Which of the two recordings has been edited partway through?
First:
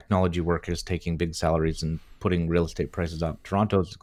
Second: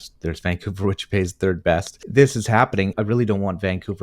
second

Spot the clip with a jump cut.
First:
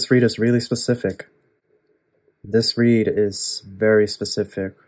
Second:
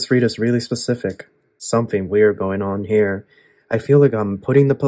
second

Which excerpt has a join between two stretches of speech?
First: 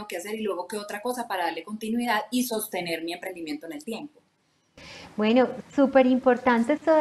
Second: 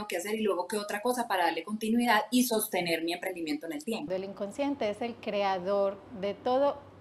second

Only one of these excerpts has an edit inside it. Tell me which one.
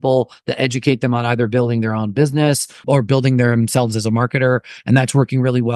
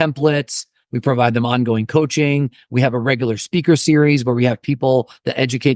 first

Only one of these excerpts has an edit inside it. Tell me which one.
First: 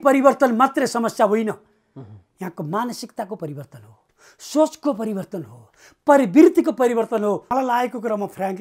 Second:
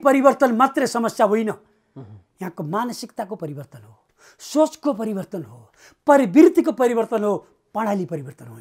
first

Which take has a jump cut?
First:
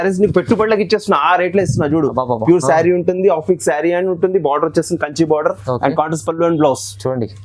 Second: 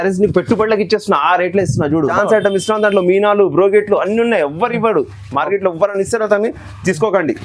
second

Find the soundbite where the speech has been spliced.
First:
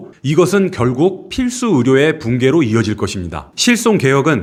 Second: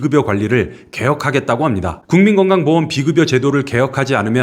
second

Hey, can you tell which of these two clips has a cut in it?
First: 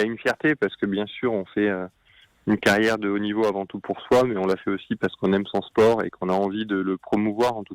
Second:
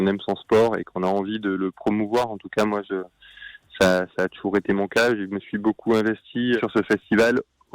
second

